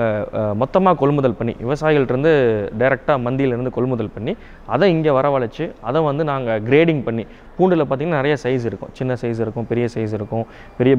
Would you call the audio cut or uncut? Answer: uncut